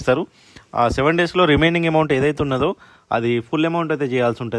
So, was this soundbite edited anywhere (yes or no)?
no